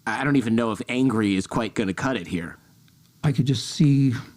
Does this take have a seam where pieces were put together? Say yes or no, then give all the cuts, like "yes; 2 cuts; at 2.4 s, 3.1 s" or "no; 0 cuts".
yes; 1 cut; at 2.5 s